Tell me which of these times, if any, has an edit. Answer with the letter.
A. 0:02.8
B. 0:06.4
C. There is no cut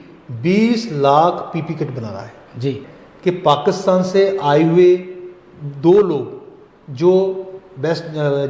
A